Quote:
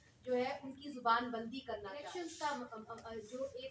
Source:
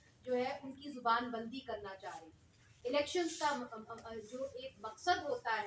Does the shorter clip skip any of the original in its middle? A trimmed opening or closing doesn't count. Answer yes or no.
yes